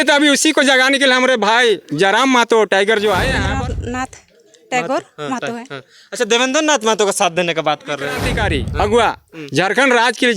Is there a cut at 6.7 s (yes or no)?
no